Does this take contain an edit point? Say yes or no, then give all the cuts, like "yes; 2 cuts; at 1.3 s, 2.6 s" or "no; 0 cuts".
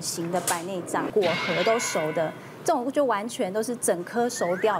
yes; 1 cut; at 1.1 s